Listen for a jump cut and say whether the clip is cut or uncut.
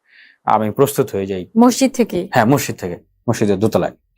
cut